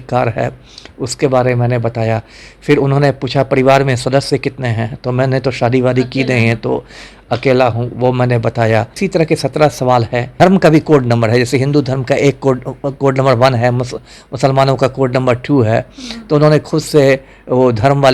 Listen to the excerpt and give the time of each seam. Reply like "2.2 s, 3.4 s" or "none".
9.0 s, 10.3 s

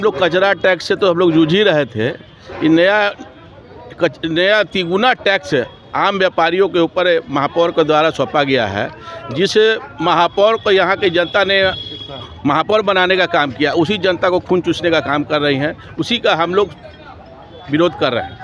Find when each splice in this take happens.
none

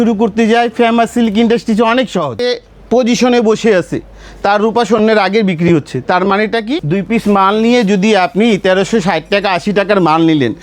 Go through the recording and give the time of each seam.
2.6 s, 6.8 s

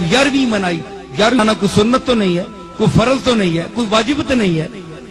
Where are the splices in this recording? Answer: 1.4 s

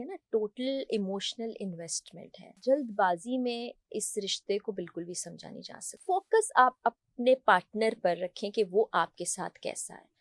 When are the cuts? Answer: 2.6 s, 6.0 s

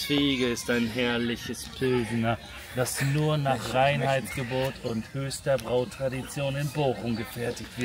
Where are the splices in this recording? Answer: none

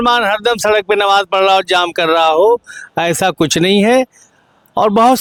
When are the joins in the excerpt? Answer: none

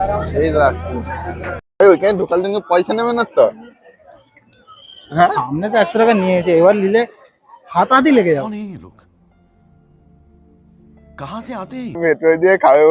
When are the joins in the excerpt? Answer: 1.8 s, 12.0 s

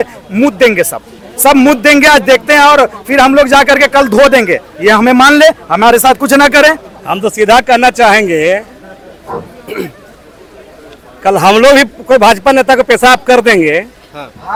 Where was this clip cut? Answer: none

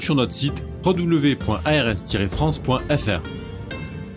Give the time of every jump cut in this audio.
3.2 s

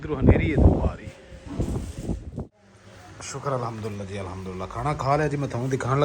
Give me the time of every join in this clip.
2.3 s

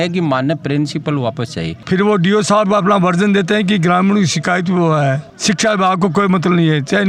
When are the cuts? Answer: 1.8 s, 5.3 s

